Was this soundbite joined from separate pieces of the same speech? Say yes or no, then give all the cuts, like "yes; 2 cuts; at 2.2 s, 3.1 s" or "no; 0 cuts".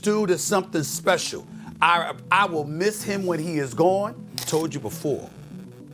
yes; 1 cut; at 4.2 s